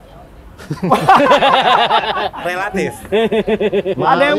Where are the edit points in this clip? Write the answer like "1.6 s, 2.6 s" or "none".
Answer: none